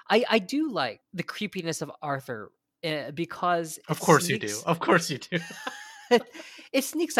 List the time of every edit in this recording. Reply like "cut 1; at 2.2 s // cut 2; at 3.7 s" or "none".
cut 1; at 1.0 s